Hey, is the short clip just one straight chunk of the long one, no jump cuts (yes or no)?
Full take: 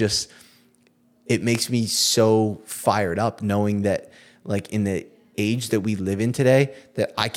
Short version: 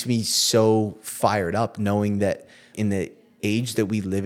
no